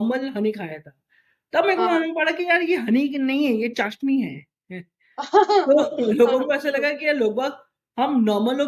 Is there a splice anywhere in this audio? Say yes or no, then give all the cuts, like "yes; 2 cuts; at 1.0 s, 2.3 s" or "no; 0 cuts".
no; 0 cuts